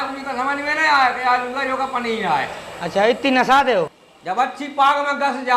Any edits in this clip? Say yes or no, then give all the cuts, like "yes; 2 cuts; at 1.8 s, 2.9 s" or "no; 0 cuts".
yes; 1 cut; at 4.0 s